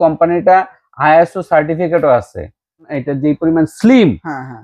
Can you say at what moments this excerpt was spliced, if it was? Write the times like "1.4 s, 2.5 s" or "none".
3.0 s